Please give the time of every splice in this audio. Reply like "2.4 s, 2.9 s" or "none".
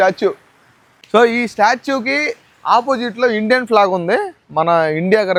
none